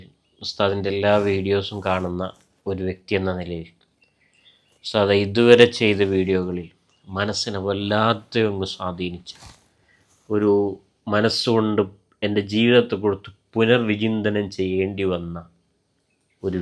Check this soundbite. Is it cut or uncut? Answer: uncut